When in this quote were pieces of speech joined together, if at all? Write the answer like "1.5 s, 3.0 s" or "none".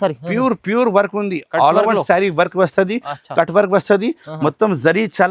none